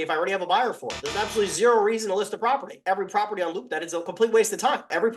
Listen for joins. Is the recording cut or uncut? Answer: cut